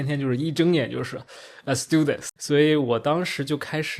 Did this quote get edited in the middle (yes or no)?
yes